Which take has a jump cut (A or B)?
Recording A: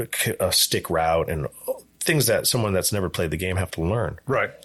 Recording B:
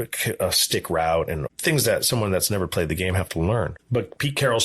B